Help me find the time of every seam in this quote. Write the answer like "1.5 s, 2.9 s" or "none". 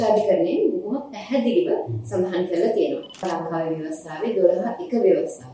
3.2 s

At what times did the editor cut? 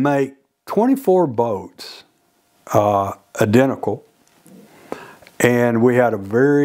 none

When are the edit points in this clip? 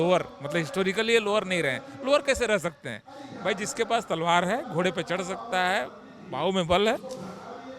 none

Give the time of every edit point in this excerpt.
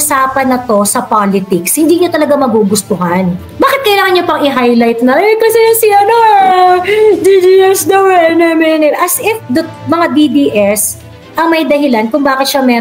3.5 s

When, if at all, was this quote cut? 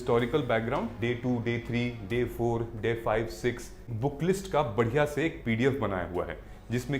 0.9 s, 3.9 s

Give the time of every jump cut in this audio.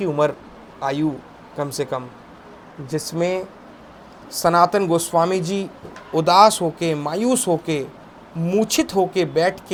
none

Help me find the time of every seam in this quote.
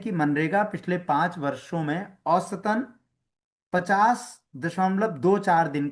none

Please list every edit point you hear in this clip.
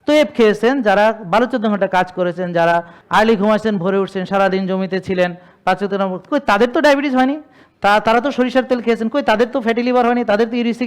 3.0 s

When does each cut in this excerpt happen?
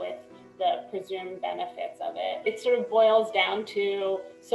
2.4 s

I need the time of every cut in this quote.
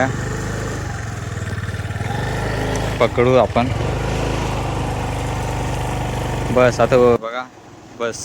7.2 s

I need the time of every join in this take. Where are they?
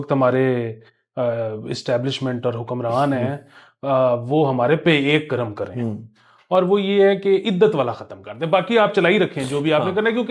none

